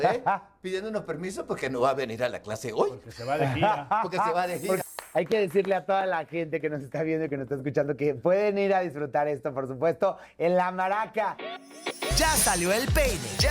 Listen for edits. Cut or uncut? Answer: cut